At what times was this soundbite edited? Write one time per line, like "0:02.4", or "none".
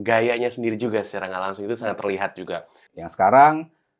0:02.8